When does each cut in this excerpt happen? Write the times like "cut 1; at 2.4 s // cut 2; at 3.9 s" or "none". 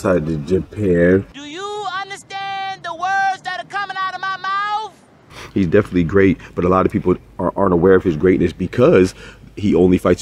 cut 1; at 1.3 s // cut 2; at 5.4 s